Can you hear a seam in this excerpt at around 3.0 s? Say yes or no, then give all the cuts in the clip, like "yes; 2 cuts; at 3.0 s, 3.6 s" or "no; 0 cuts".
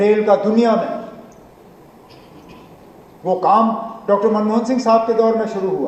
no; 0 cuts